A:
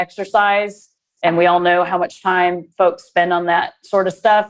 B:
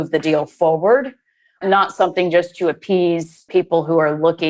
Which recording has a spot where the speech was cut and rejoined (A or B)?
B